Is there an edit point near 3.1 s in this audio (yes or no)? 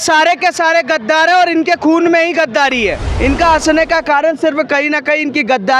yes